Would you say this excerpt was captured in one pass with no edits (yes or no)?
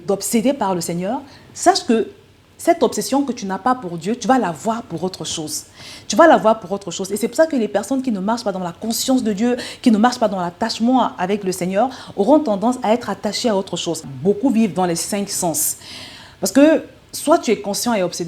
yes